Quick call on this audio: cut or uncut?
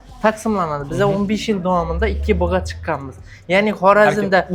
uncut